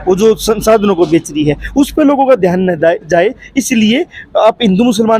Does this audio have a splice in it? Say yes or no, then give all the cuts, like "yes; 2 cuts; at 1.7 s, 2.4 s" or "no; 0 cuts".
no; 0 cuts